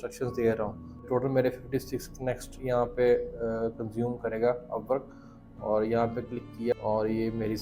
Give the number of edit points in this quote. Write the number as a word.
two